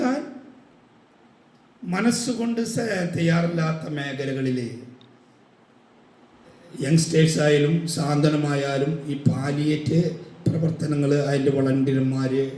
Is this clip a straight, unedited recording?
yes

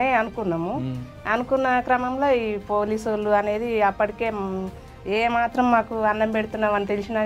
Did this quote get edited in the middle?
no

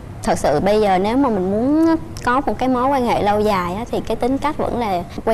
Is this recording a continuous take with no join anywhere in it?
yes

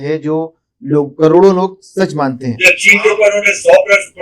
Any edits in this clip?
yes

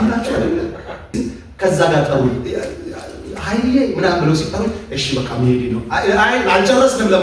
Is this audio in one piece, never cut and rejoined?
no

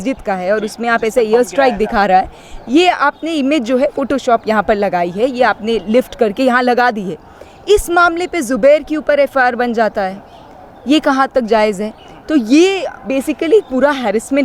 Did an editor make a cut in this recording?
no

